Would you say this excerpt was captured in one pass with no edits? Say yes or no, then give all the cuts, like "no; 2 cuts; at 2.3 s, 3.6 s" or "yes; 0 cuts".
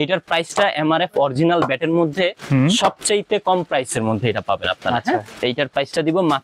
no; 1 cut; at 5.3 s